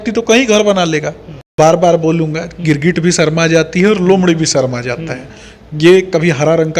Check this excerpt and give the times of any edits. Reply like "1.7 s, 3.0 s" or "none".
1.5 s